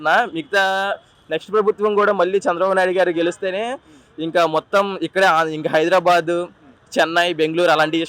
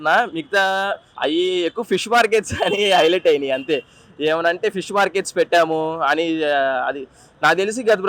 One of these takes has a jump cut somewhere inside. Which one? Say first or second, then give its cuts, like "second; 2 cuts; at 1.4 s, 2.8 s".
second; 1 cut; at 1.0 s